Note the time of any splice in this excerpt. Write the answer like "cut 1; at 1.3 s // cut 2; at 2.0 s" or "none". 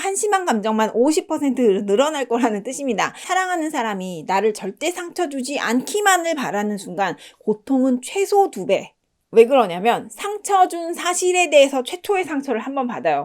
cut 1; at 3.2 s